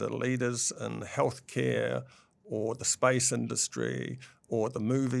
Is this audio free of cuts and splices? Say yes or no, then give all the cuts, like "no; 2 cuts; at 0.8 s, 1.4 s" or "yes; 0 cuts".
yes; 0 cuts